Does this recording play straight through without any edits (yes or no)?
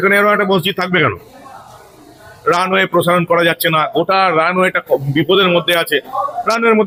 yes